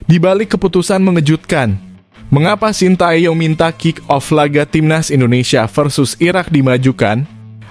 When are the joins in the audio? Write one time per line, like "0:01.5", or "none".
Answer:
none